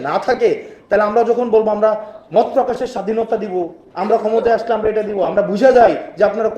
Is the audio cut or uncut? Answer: uncut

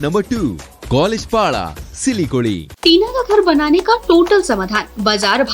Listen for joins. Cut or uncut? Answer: cut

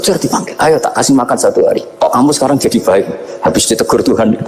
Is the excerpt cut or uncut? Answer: cut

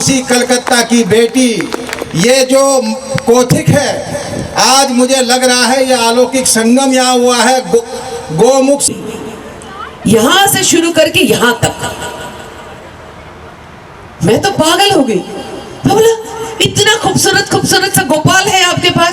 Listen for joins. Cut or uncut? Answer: cut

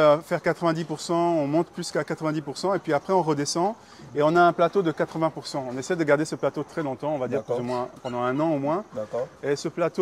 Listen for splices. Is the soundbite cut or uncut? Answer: uncut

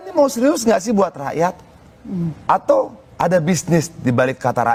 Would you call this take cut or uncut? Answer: uncut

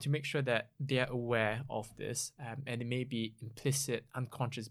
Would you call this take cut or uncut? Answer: uncut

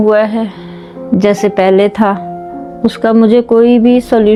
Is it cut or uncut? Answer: uncut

